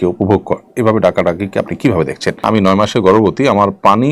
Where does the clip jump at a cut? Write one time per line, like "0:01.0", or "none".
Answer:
0:02.4